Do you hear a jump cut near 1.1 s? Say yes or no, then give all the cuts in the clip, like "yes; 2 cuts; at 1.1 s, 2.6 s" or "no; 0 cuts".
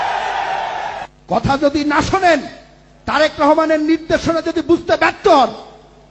yes; 1 cut; at 1.1 s